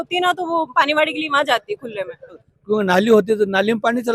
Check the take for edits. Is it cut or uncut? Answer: cut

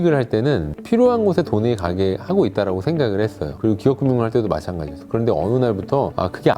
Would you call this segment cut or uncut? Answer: uncut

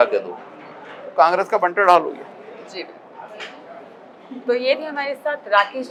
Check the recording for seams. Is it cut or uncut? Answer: uncut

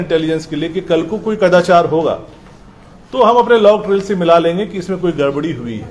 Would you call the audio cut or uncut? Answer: uncut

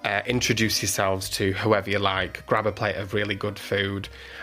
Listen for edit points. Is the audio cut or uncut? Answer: uncut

